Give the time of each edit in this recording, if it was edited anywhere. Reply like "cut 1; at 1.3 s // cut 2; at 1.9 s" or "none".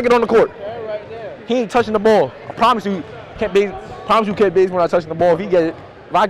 none